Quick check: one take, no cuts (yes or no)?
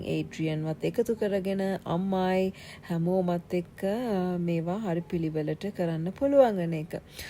yes